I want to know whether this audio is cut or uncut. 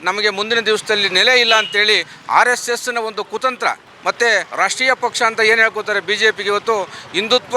cut